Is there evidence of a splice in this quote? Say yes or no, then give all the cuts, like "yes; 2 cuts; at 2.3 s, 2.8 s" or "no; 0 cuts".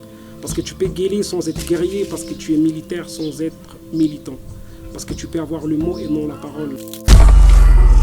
yes; 1 cut; at 7.0 s